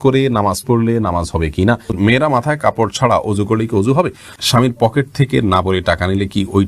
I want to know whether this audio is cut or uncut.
cut